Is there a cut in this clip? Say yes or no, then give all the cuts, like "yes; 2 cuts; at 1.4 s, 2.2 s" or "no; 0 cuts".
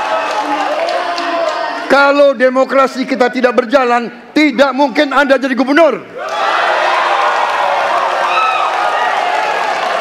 no; 0 cuts